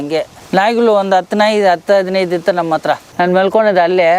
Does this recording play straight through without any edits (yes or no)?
no